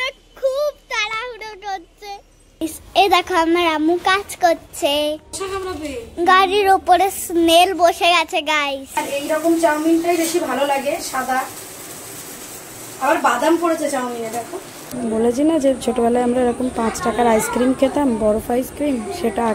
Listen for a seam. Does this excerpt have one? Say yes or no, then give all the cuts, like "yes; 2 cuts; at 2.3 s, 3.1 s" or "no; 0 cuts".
yes; 3 cuts; at 2.6 s, 9.0 s, 14.9 s